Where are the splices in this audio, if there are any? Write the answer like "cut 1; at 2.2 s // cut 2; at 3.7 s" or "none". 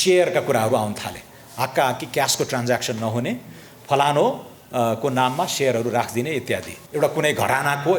cut 1; at 6.8 s